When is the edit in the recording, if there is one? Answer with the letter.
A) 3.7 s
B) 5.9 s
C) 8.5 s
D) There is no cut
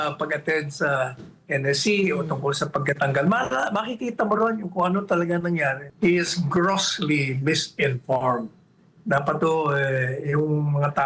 B